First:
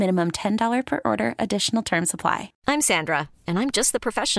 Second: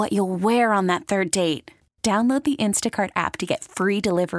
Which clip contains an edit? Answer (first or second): first